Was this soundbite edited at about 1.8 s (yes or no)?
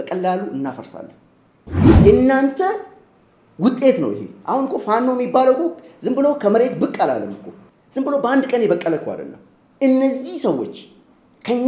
yes